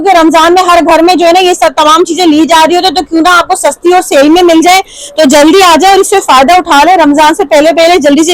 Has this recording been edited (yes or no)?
no